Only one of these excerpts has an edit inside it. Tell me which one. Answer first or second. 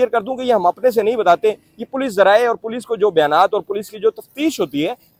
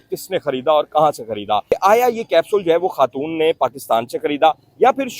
second